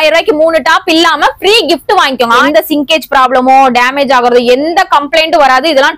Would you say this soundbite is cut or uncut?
cut